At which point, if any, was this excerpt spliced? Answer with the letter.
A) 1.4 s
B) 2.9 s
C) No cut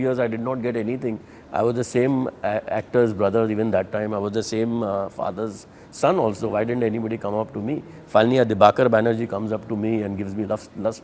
C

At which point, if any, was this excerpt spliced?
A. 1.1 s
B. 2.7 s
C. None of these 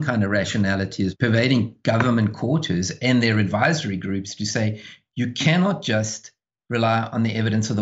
A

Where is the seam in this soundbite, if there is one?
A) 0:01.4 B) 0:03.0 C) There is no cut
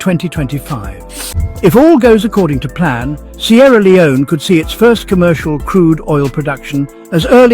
A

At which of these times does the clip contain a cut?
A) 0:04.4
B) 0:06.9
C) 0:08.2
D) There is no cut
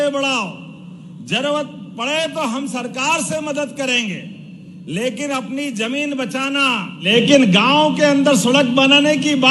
B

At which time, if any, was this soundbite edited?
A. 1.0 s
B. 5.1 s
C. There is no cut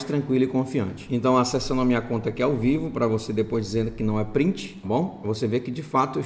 A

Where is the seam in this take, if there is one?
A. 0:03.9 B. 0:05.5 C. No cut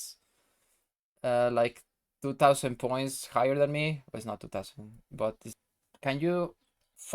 B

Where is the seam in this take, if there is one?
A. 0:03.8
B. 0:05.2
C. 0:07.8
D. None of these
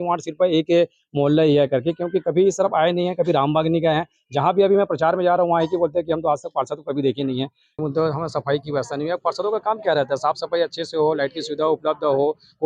C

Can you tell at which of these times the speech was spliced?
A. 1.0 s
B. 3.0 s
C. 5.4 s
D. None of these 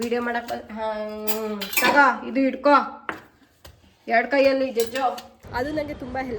C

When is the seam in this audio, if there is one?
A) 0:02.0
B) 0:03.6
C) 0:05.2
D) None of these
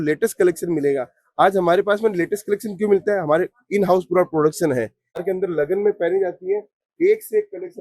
C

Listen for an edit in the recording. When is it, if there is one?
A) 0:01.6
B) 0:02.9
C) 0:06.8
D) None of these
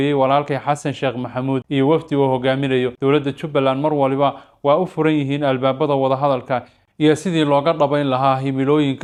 D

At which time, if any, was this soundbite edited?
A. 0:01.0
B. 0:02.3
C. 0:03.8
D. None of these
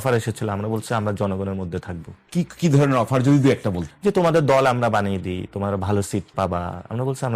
C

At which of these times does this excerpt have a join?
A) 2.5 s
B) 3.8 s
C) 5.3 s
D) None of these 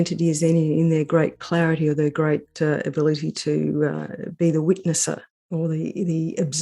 C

